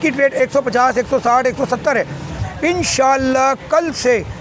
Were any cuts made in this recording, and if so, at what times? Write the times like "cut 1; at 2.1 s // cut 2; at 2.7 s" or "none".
cut 1; at 2.3 s